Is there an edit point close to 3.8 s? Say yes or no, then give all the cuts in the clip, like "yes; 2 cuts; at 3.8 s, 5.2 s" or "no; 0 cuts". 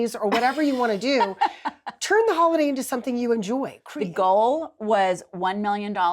yes; 1 cut; at 3.8 s